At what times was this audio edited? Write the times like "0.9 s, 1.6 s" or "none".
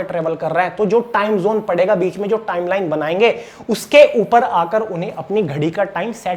none